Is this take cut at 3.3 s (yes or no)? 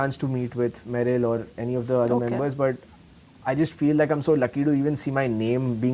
no